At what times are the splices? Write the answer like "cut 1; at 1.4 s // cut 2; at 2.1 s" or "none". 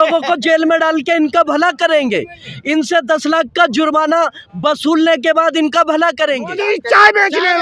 cut 1; at 6.6 s